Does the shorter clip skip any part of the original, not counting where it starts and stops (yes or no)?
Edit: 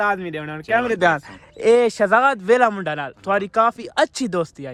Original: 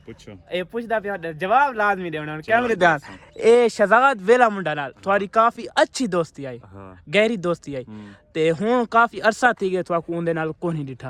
no